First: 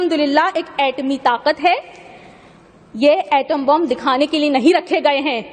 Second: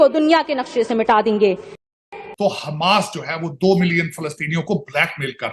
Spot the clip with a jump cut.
second; 1 cut; at 2.2 s

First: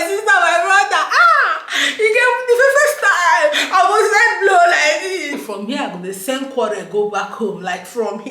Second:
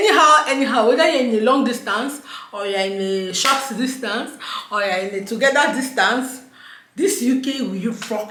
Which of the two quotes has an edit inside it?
first; 1 cut; at 5.4 s

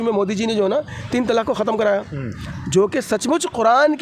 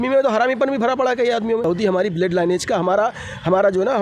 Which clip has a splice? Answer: second; 1 cut; at 1.6 s

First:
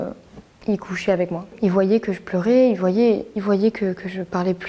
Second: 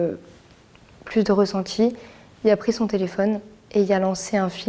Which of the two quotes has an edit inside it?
first; 1 cut; at 1.4 s

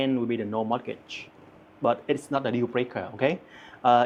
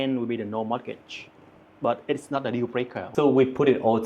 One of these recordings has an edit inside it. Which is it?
second; 1 cut; at 3.0 s

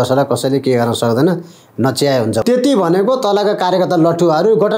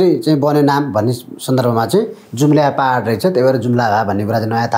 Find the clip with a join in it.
first; 1 cut; at 2.4 s

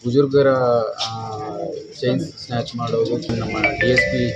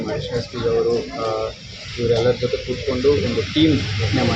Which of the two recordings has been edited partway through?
first; 1 cut; at 3.3 s

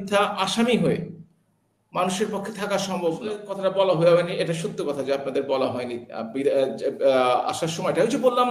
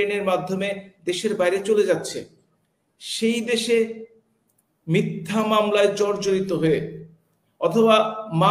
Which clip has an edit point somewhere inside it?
first; 1 cut; at 3.5 s

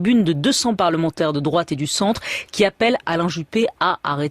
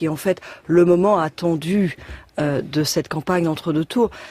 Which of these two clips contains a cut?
first; 1 cut; at 2.7 s

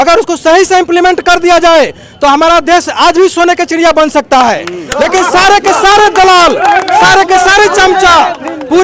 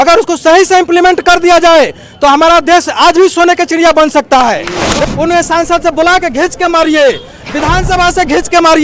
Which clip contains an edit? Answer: second; 1 cut; at 5.0 s

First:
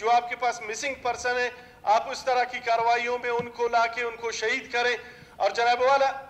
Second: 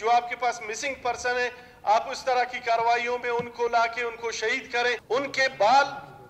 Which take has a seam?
second; 1 cut; at 5.0 s

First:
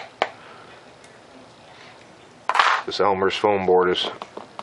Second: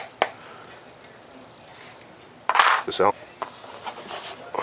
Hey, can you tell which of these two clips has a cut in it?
first; 1 cut; at 3.1 s

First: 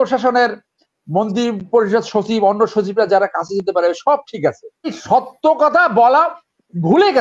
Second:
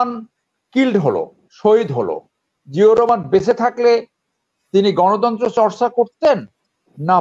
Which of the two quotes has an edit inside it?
first; 1 cut; at 5.0 s

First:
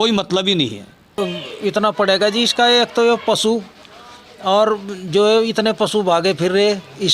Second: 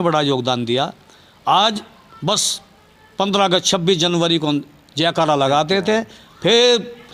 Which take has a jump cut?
first; 1 cut; at 1.0 s

